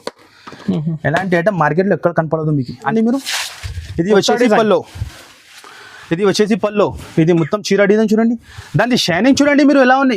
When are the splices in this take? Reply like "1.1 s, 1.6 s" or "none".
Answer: 2.9 s